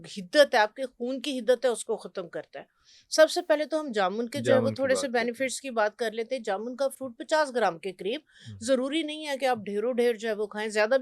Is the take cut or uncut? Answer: uncut